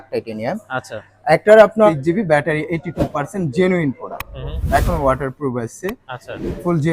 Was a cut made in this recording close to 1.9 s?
yes; 1 cut; at 1.9 s

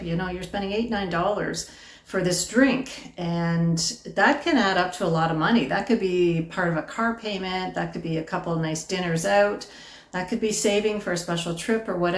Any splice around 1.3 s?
no; 0 cuts

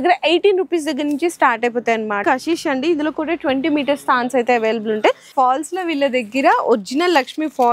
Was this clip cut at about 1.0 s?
no; 2 cuts; at 2.2 s, 5.3 s

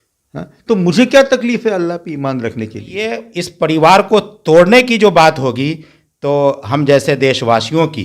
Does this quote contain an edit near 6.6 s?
no; 1 cut; at 3.2 s

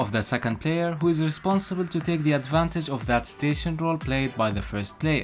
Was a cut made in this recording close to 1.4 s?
no; 0 cuts

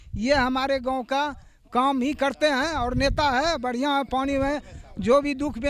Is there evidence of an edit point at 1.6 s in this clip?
no; 0 cuts

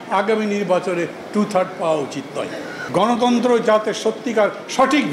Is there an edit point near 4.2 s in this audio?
no; 1 cut; at 2.8 s

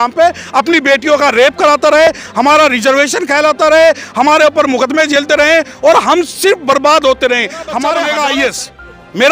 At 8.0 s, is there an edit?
yes; 1 cut; at 8.0 s

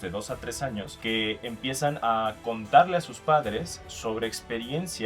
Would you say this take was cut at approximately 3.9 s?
no; 2 cuts; at 0.9 s, 2.0 s

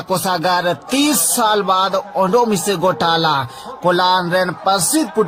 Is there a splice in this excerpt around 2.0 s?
no; 0 cuts

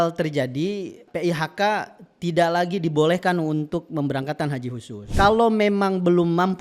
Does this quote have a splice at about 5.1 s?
yes; 2 cuts; at 1.0 s, 5.1 s

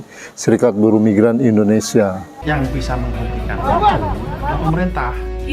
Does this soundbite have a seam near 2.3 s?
yes; 1 cut; at 2.3 s

